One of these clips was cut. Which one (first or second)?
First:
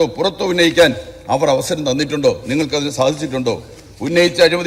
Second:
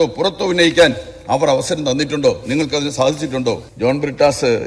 second